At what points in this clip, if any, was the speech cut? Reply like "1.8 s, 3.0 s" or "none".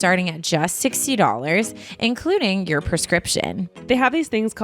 3.7 s

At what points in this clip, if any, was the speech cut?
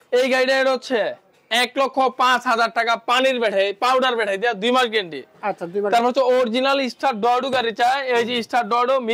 none

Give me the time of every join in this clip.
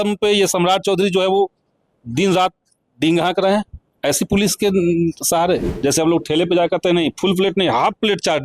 5.7 s

